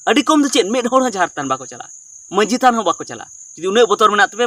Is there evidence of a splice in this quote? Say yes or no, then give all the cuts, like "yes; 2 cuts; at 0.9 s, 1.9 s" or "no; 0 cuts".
no; 0 cuts